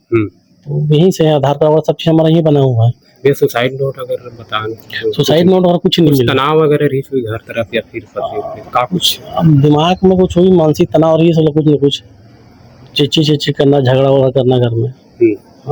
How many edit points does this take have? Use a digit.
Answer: 0